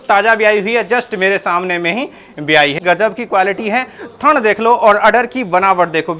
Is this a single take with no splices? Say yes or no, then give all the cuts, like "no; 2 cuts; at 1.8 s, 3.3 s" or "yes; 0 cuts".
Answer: no; 1 cut; at 2.8 s